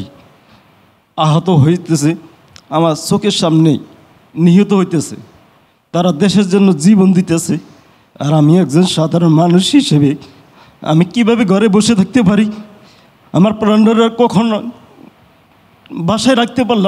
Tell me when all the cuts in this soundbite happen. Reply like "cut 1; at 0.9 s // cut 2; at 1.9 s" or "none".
none